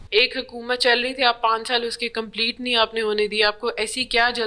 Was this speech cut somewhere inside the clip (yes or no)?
no